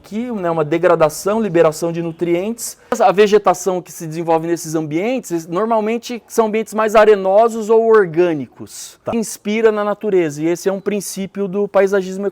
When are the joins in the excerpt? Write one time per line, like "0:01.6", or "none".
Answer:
0:03.0
0:09.1